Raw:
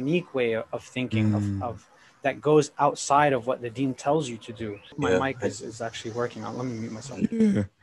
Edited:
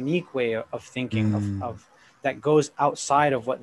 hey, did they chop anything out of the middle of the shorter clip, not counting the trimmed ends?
no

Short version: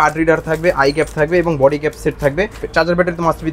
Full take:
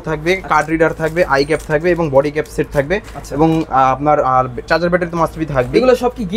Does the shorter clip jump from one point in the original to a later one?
yes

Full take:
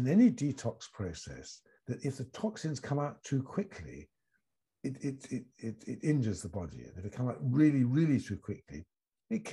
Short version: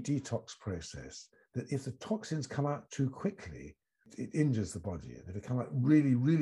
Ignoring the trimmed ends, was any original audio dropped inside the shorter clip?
yes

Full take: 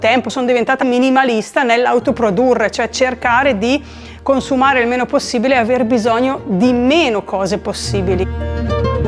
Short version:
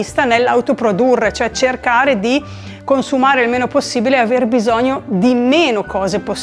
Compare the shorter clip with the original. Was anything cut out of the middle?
no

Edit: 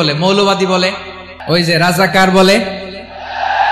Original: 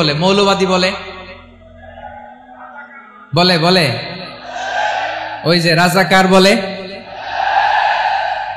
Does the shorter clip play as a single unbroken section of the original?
no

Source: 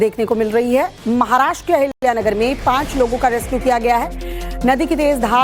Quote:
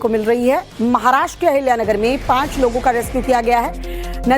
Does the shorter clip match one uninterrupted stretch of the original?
no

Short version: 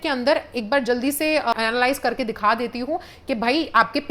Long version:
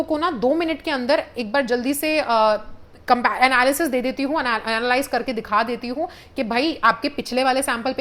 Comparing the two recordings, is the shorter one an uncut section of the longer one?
no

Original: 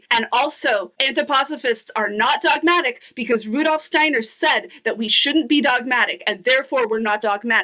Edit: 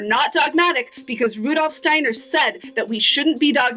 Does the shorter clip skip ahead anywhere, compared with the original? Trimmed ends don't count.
no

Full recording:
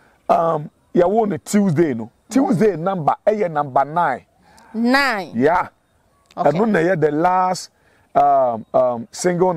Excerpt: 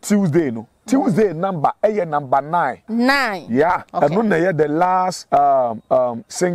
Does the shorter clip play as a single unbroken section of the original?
no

